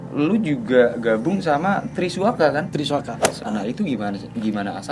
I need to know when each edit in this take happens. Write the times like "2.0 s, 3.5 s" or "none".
3.4 s